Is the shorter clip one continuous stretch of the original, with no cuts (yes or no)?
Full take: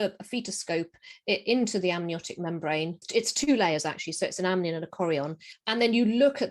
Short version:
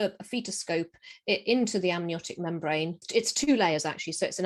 yes